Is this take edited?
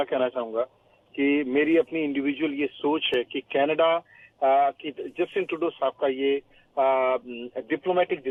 no; 0 cuts

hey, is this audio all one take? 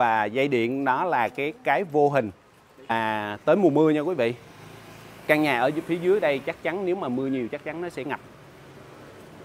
no; 1 cut; at 2.9 s

